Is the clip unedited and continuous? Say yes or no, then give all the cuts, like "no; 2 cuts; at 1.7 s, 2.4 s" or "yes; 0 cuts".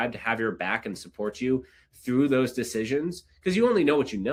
yes; 0 cuts